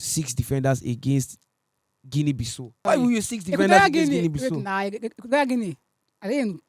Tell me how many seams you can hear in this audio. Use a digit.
1